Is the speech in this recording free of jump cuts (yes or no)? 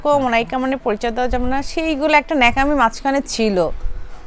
yes